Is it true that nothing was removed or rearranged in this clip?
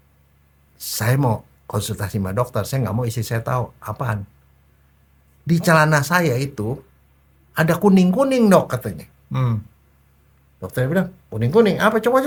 yes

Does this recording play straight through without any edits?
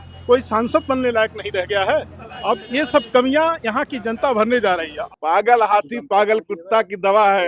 no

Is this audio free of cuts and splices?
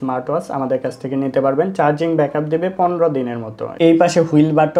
no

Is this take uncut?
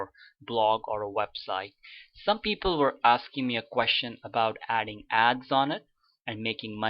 no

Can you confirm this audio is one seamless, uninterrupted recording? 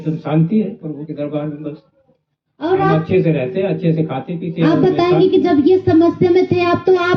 yes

